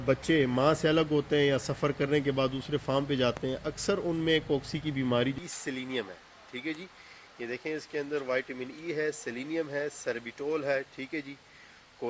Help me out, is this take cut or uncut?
cut